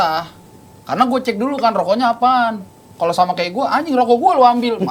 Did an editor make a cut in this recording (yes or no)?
no